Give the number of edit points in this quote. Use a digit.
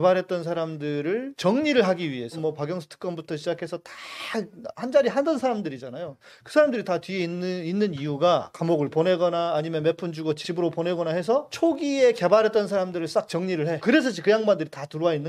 6